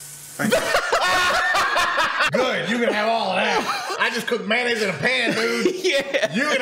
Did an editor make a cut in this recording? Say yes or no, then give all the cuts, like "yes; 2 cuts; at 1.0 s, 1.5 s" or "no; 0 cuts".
yes; 2 cuts; at 2.3 s, 3.9 s